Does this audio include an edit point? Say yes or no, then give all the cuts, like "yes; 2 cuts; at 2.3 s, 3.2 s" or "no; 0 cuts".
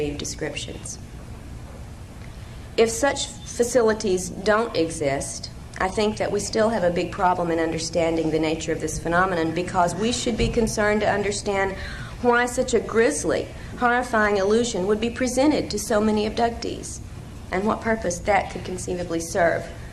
no; 0 cuts